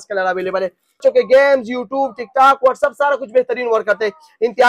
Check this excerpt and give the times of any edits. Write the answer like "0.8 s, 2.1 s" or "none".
1.0 s